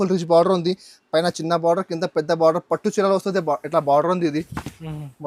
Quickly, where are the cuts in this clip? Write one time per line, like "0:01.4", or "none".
none